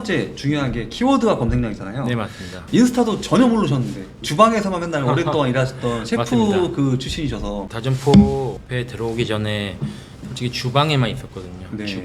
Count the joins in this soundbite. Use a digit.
2